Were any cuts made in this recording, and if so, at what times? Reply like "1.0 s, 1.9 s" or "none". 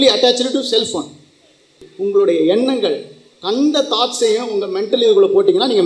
1.8 s